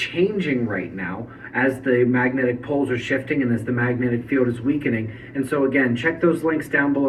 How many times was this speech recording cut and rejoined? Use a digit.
0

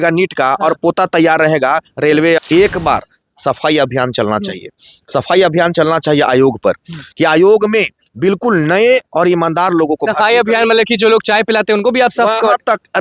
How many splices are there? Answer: 1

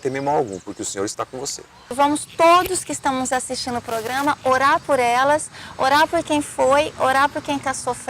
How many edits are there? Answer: 1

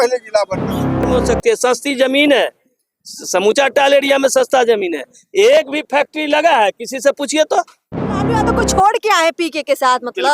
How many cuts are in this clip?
2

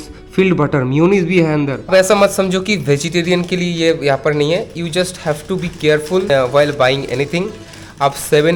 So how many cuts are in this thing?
0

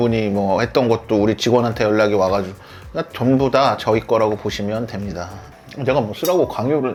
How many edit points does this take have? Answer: 0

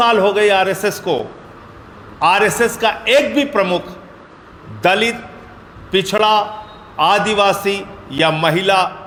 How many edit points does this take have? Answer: 0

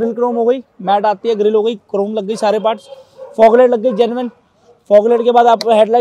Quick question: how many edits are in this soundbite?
0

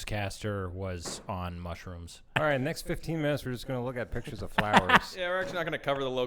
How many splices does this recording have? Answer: 1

